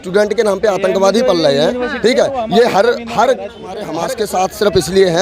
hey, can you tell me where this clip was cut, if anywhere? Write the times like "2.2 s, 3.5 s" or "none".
3.8 s